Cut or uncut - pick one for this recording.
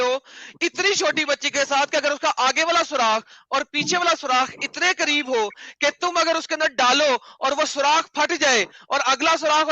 uncut